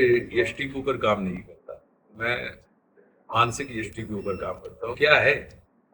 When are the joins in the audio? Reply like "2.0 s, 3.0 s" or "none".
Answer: 5.0 s